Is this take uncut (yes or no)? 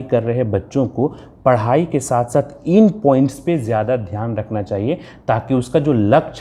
yes